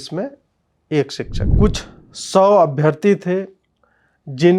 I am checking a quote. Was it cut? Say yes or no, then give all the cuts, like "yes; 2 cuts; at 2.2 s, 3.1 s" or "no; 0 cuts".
yes; 1 cut; at 1.4 s